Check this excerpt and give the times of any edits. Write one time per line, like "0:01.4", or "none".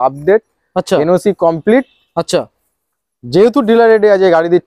none